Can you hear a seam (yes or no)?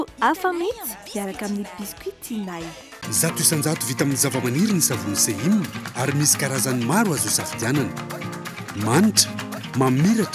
yes